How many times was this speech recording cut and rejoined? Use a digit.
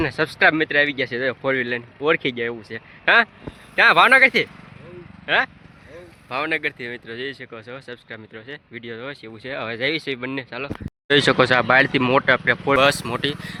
0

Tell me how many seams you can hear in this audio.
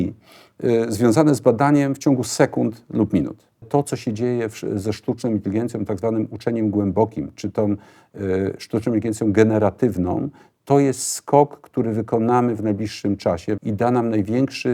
2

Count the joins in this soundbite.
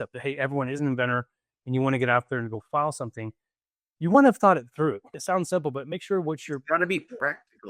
1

